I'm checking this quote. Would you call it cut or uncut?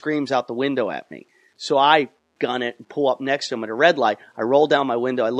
uncut